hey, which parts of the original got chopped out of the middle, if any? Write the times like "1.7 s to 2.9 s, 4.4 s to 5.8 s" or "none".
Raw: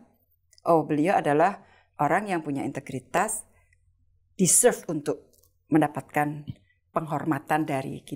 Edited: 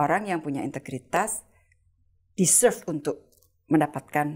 none